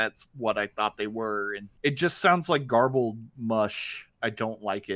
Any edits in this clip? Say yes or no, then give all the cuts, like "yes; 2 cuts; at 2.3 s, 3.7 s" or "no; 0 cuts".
yes; 2 cuts; at 1.6 s, 4.1 s